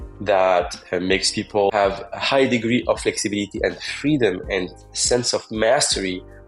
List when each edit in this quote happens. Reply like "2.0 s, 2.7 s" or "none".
1.7 s